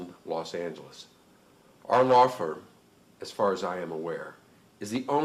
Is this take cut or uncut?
uncut